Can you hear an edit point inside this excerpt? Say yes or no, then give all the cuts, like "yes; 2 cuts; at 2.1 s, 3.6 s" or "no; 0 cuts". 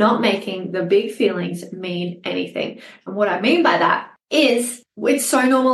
yes; 2 cuts; at 4.1 s, 4.8 s